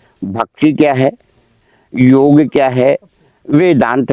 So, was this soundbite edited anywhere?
no; 0 cuts

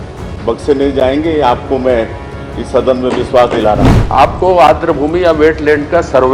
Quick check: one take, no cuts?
no; 1 cut; at 3.9 s

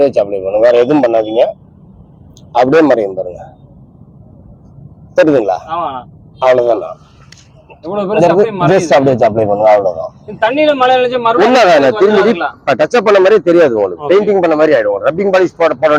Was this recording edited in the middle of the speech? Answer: no; 0 cuts

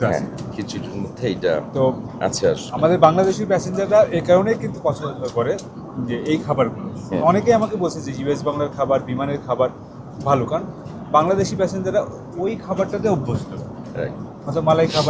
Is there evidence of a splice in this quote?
no; 0 cuts

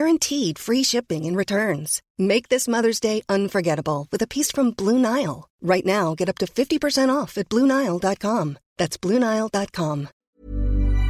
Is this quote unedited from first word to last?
no; 1 cut; at 10.1 s

